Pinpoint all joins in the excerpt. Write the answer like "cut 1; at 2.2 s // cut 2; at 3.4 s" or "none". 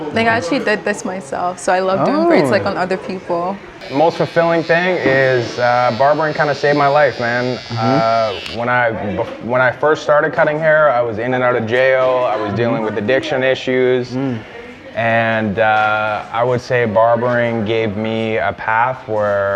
cut 1; at 3.8 s